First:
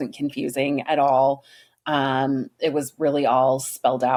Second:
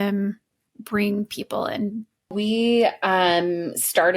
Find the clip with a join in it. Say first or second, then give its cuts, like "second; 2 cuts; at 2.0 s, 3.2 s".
second; 1 cut; at 2.3 s